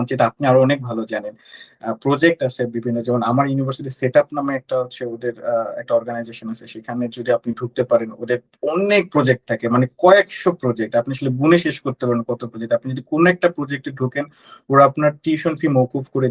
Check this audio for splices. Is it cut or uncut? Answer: uncut